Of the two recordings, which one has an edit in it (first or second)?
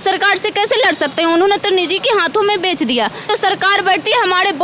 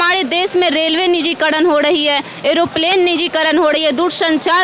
first